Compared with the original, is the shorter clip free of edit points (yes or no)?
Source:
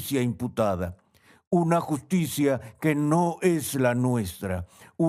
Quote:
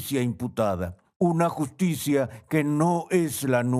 no